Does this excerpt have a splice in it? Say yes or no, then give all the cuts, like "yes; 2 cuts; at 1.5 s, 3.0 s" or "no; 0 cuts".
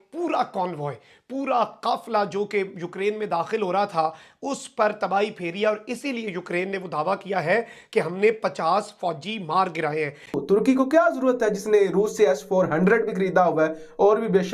yes; 1 cut; at 10.3 s